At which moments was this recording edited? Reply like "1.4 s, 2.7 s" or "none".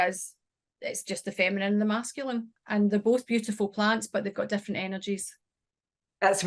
2.6 s

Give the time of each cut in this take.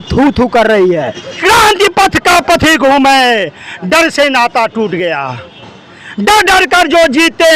1.4 s

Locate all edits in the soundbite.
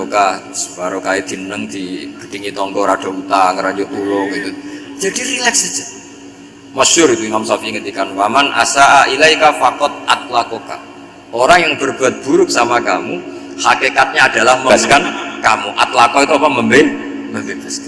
14.7 s

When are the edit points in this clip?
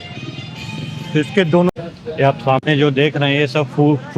1.7 s

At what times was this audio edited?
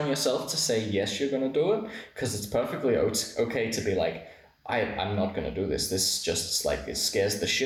none

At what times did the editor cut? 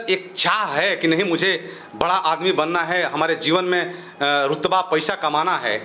none

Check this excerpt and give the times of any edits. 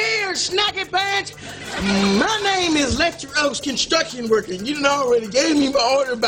none

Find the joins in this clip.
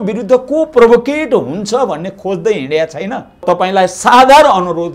3.4 s

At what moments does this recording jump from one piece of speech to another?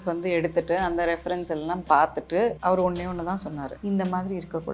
2.6 s, 3.7 s

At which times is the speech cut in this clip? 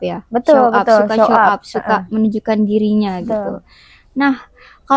none

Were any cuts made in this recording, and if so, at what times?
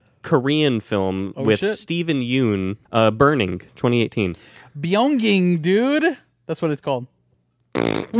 2.8 s

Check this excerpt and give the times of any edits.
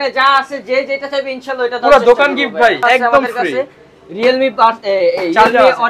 2.8 s

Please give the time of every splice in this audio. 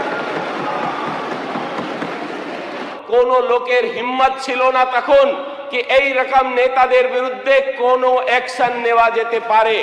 2.8 s

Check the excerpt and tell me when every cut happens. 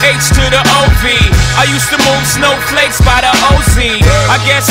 none

